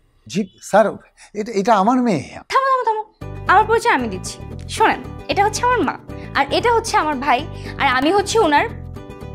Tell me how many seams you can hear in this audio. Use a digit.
0